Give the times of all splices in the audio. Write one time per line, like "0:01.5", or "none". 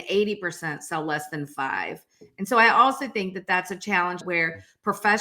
0:04.2

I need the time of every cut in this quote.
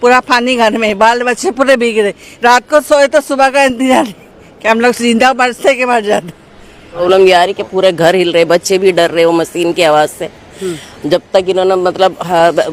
0:07.0

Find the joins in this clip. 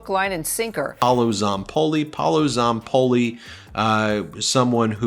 0:00.9

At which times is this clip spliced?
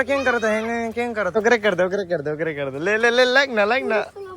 0:01.4

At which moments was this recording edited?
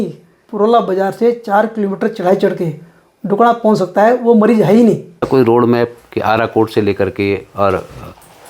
0:05.3

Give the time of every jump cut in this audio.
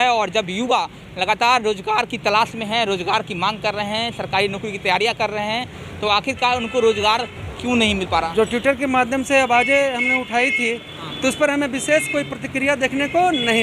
0:08.0

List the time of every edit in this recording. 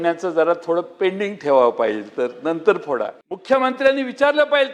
0:03.3

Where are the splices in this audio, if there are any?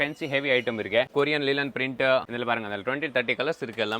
0:01.1
0:02.3

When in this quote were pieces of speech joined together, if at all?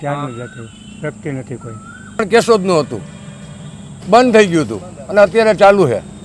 0:02.2

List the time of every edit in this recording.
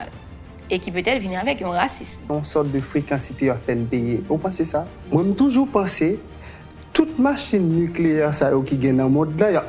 0:02.2
0:05.0

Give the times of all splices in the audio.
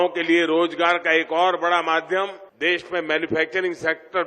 0:02.4

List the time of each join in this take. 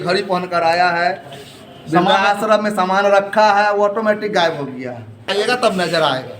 0:05.3

